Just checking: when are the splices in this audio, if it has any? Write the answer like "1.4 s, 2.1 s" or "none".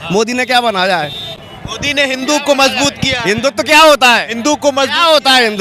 none